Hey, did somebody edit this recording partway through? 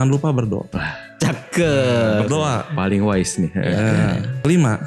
no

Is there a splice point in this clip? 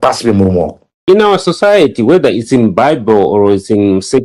yes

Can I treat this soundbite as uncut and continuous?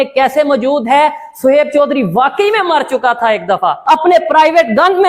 no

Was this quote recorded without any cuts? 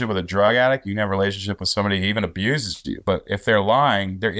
yes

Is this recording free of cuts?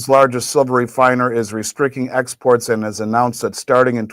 yes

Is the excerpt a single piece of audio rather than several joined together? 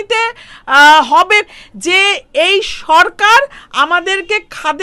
no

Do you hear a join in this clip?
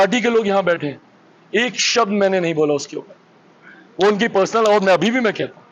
no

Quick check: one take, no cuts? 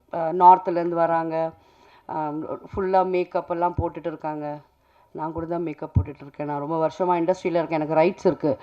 yes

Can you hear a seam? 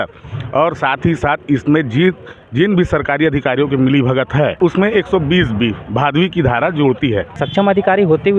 yes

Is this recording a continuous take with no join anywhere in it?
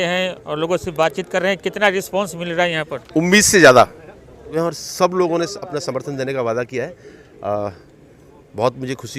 no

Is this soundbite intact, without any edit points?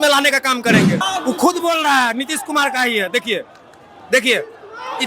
no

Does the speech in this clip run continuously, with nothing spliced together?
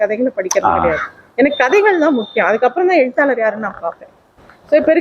yes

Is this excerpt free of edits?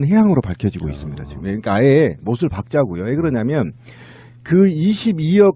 yes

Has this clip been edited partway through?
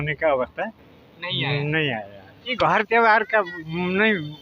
yes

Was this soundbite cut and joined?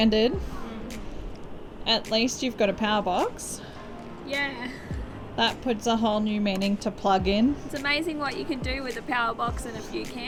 no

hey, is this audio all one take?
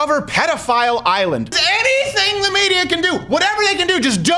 no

